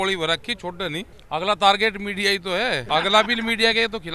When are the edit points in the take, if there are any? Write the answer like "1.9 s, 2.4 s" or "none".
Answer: 1.2 s, 2.8 s